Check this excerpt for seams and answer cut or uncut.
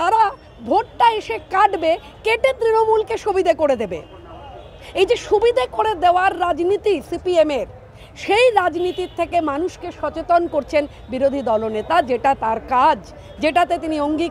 uncut